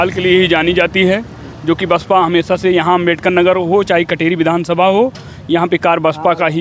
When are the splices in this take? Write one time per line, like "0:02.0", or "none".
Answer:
none